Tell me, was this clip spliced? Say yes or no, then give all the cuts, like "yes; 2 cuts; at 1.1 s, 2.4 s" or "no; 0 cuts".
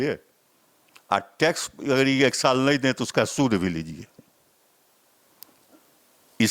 no; 0 cuts